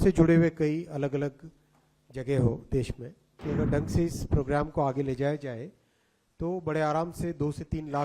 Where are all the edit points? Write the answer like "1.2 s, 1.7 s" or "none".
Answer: 3.4 s